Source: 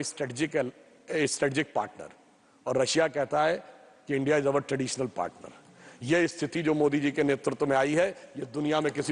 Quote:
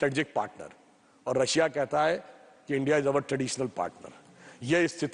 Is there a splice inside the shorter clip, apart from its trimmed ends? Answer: no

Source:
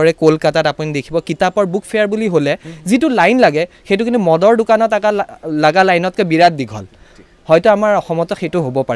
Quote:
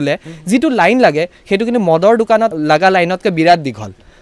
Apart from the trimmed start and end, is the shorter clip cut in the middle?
yes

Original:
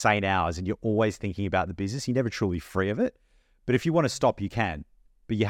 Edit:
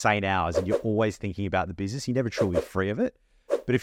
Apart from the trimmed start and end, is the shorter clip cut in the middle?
no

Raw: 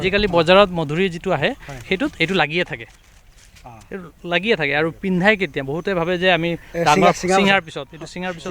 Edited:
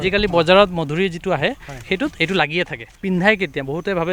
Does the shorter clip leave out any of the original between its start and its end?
yes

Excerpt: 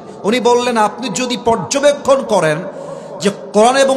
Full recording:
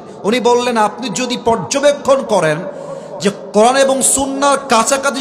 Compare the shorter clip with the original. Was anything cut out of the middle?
no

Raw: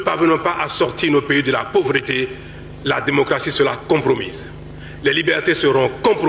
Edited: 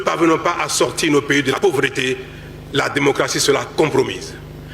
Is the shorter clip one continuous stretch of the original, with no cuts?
no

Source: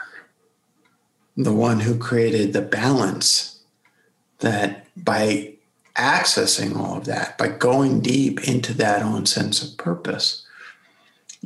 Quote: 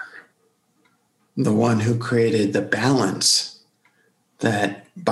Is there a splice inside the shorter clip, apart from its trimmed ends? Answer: no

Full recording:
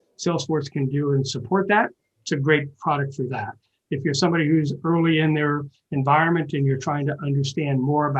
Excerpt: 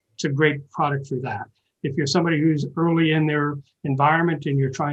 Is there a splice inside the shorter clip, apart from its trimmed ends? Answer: no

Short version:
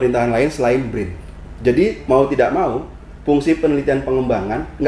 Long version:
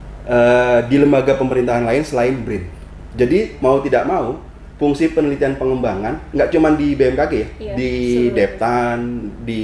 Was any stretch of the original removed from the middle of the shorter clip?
no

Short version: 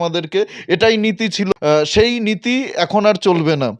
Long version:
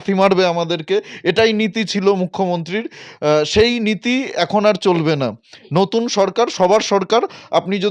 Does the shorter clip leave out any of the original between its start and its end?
yes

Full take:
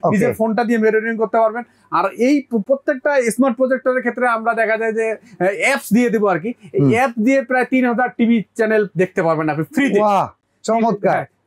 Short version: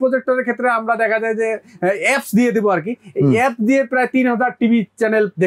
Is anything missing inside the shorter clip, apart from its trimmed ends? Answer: no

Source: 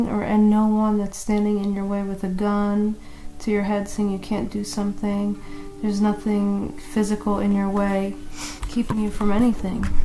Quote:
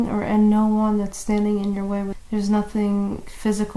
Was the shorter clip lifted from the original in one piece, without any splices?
no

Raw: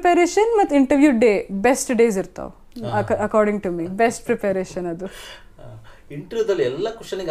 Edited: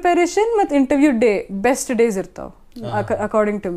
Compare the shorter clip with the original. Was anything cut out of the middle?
no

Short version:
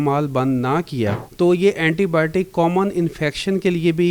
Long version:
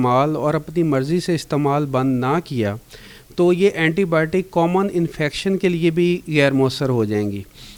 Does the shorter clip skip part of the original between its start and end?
yes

